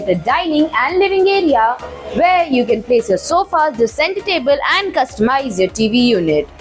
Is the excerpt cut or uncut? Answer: uncut